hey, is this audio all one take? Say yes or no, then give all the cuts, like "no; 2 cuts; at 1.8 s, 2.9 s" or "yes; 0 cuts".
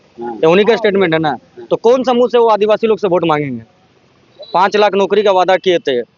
yes; 0 cuts